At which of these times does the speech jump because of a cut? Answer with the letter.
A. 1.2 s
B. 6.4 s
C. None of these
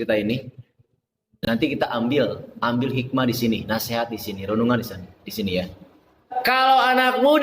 B